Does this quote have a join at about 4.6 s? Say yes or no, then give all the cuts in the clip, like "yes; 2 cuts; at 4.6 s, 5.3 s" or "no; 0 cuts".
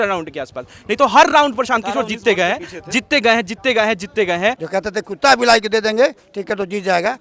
yes; 1 cut; at 4.6 s